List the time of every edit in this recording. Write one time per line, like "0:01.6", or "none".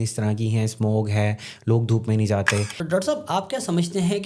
0:02.8